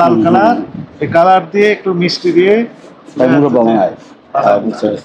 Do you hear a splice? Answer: no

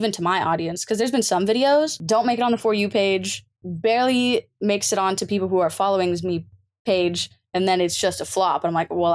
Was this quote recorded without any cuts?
no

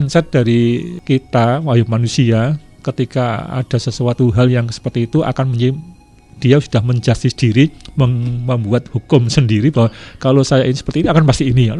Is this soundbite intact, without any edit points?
no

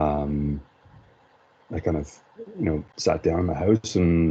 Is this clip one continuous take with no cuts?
yes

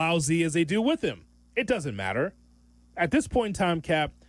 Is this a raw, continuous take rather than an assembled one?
yes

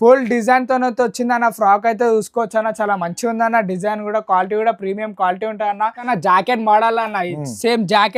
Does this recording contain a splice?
yes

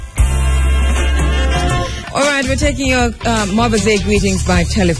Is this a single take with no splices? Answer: no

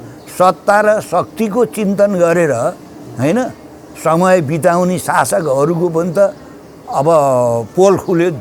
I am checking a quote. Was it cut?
no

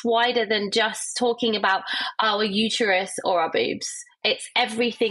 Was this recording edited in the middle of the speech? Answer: no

